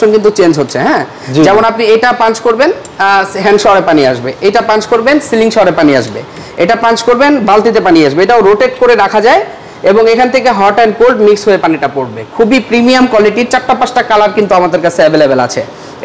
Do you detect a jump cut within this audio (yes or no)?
no